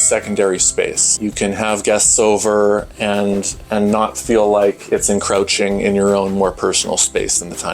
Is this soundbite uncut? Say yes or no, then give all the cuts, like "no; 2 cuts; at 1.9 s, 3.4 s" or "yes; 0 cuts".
no; 1 cut; at 1.0 s